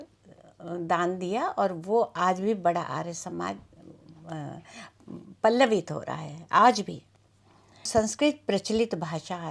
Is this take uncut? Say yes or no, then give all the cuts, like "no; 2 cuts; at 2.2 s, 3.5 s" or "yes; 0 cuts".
no; 1 cut; at 7.9 s